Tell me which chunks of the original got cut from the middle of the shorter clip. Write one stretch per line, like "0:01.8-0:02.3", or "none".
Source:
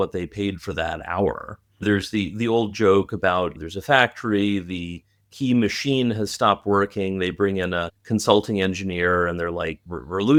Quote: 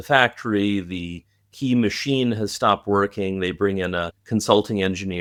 none